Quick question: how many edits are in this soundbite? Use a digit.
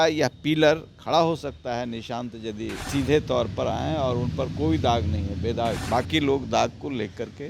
2